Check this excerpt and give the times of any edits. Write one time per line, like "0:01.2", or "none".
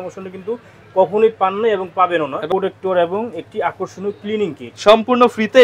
0:02.4